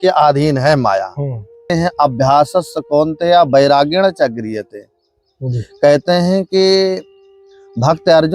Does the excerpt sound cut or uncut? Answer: cut